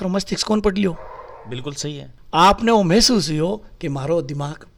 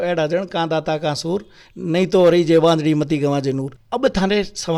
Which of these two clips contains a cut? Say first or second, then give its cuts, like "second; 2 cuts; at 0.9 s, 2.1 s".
second; 1 cut; at 3.7 s